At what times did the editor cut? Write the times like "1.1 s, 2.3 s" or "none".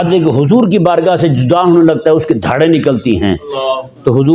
none